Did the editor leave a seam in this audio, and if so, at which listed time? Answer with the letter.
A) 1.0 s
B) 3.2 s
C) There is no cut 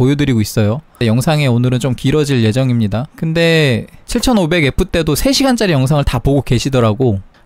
A